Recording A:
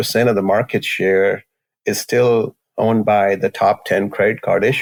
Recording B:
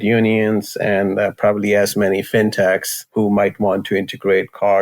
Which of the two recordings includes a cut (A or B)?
B